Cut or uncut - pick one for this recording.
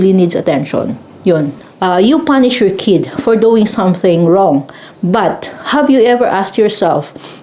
cut